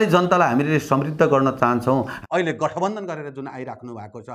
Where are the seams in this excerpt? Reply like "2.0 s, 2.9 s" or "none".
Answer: 2.1 s